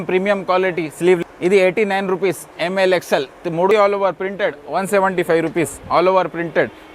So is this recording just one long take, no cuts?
no; 2 cuts; at 1.2 s, 3.7 s

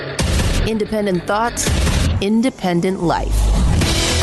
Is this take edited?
no; 0 cuts

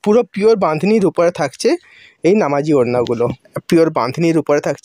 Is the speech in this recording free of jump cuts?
no; 1 cut; at 3.5 s

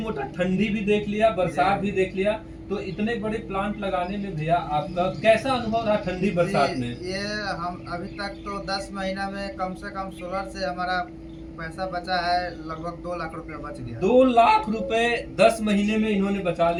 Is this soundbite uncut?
yes; 0 cuts

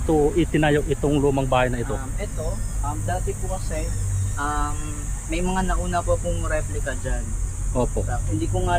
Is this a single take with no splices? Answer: yes; 0 cuts

